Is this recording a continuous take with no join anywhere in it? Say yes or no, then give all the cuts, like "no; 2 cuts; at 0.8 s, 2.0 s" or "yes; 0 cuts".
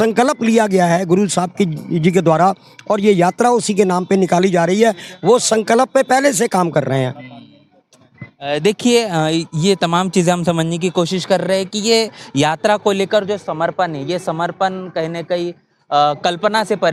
yes; 0 cuts